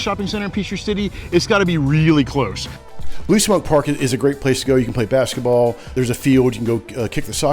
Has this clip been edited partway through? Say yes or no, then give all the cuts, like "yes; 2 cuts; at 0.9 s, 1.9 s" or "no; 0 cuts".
yes; 2 cuts; at 2.6 s, 5.9 s